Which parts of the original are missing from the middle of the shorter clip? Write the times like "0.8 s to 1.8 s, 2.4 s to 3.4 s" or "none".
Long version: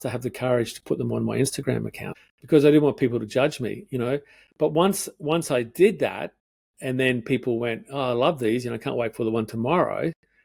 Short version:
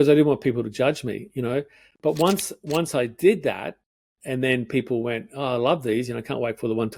none